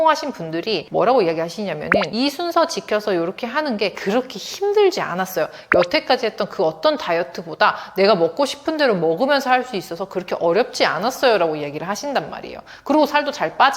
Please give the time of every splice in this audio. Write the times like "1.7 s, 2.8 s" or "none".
0.8 s, 2.0 s